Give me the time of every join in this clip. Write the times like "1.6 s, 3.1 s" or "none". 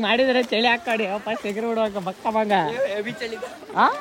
none